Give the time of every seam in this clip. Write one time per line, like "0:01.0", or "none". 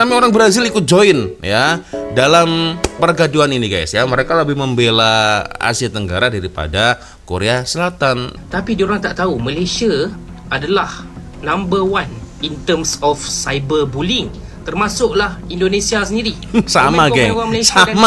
0:08.3